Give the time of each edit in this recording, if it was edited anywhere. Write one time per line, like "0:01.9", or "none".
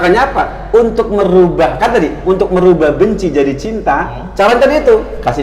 0:04.2